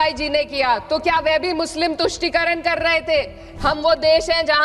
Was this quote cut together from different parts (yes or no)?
yes